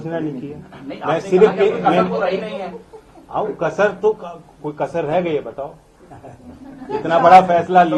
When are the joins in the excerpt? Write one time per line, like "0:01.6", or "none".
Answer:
none